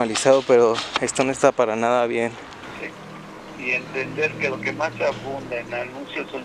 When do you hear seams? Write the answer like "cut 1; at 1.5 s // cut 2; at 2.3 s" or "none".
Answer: cut 1; at 2.7 s